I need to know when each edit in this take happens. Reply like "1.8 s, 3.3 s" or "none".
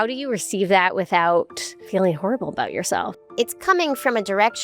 1.8 s, 3.1 s